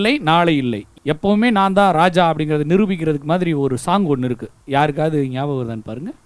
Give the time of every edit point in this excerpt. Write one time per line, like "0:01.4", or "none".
0:04.5